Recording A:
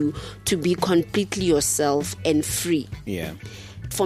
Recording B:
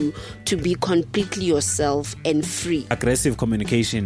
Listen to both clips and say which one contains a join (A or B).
B